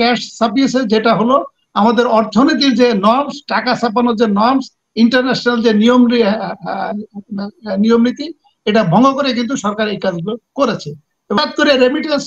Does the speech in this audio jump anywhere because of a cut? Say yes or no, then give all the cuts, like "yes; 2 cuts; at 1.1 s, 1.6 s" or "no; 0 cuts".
yes; 1 cut; at 11.4 s